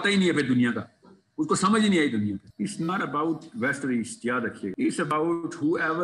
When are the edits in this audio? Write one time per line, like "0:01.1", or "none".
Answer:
0:02.5
0:04.7